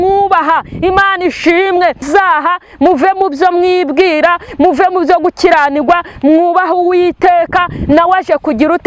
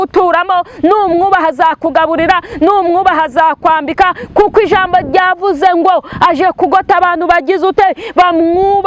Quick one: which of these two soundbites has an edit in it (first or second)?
first